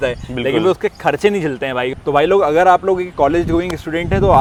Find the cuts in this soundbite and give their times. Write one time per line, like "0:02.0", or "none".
none